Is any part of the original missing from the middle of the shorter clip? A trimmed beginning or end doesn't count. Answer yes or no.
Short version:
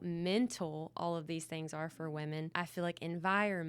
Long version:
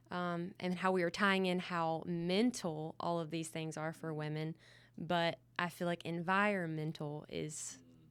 yes